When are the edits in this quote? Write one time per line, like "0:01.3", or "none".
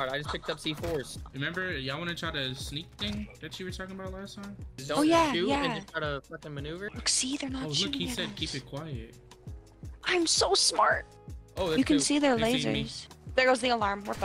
none